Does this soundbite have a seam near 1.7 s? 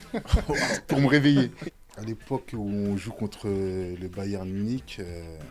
yes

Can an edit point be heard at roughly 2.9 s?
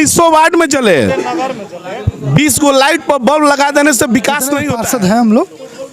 no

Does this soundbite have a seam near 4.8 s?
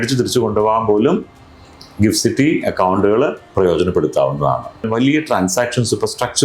yes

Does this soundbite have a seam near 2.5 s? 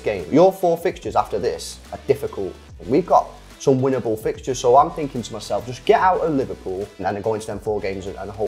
no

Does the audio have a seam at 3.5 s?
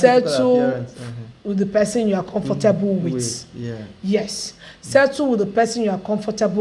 no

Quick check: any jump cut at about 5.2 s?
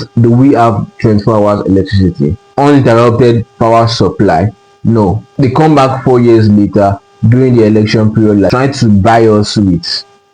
yes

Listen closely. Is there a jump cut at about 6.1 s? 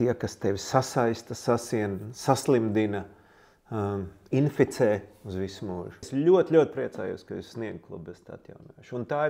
yes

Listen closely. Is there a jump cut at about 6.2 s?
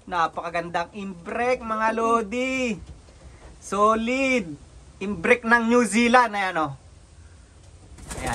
no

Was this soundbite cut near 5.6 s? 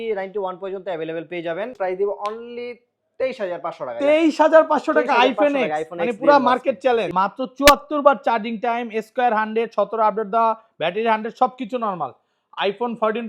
no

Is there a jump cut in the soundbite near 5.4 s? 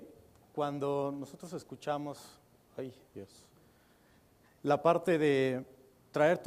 yes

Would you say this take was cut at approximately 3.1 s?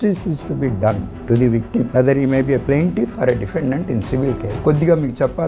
no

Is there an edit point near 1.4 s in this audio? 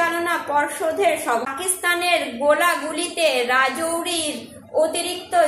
yes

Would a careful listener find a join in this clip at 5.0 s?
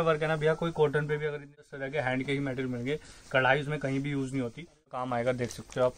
yes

